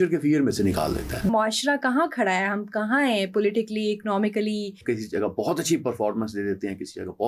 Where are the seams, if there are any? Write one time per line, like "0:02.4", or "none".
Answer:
0:01.3
0:04.8